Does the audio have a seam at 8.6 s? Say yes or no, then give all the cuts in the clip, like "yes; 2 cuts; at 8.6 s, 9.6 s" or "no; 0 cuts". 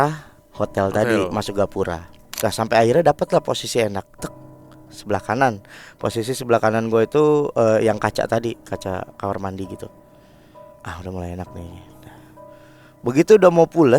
no; 1 cut; at 2.2 s